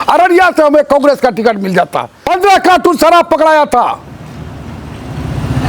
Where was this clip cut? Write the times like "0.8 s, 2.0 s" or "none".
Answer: 2.2 s